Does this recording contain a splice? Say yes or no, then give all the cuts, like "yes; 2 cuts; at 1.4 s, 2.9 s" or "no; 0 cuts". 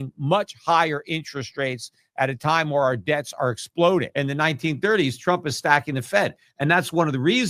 yes; 1 cut; at 4.1 s